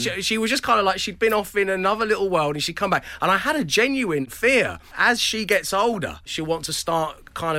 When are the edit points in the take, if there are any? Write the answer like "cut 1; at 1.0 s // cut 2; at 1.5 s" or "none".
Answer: cut 1; at 4.6 s // cut 2; at 6.3 s